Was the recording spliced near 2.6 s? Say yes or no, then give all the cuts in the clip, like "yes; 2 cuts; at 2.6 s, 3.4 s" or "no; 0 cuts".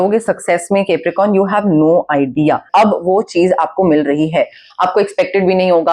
yes; 1 cut; at 2.6 s